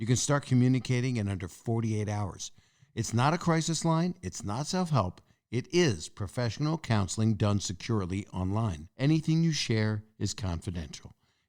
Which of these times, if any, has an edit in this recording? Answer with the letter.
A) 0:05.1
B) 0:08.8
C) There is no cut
B